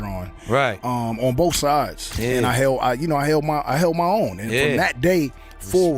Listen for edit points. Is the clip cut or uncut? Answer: cut